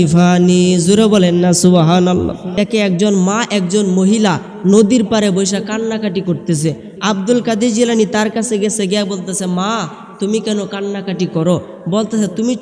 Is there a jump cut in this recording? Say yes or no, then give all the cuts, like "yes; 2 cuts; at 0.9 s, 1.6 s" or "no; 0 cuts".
yes; 1 cut; at 2.5 s